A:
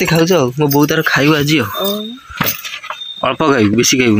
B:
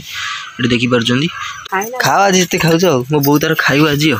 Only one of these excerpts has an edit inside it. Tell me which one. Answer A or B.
B